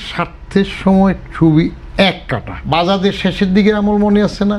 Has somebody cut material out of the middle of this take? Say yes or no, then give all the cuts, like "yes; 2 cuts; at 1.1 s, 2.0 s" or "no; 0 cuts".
yes; 1 cut; at 2.6 s